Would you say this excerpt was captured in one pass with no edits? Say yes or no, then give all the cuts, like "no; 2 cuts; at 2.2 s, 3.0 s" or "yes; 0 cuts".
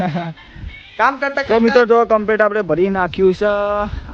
no; 1 cut; at 1.5 s